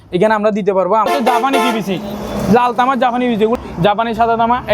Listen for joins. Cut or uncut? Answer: cut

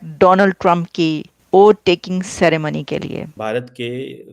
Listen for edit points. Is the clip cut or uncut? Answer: cut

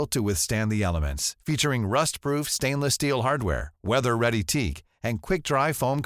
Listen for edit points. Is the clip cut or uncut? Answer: uncut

